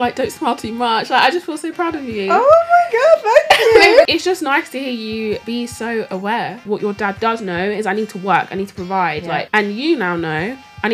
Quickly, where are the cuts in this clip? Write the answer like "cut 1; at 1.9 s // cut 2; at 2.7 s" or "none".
cut 1; at 4.0 s // cut 2; at 5.4 s // cut 3; at 6.6 s // cut 4; at 9.5 s